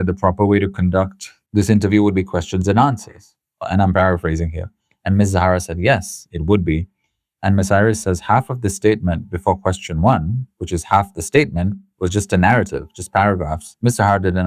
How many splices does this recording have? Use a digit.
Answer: 0